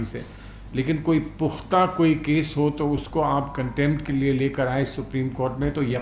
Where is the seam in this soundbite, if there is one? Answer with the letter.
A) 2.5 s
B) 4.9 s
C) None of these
C